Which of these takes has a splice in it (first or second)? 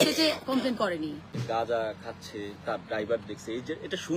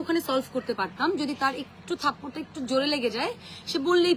first